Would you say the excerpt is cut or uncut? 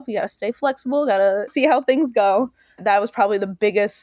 cut